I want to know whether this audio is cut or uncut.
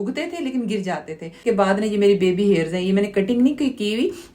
cut